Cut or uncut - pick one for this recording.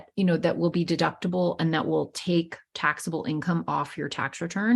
uncut